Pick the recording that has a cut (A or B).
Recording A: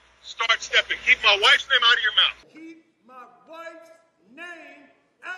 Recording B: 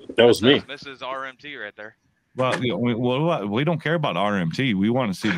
A